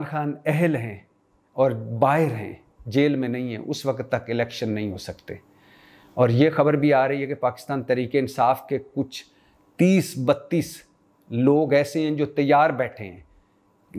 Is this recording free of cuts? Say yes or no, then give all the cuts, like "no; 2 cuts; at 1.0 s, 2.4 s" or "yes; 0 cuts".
yes; 0 cuts